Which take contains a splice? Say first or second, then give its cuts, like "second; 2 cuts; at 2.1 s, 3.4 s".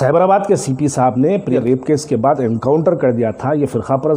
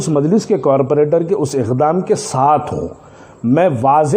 first; 1 cut; at 1.6 s